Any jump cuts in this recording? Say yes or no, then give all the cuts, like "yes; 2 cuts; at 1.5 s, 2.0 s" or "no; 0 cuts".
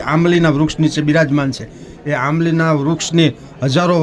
no; 0 cuts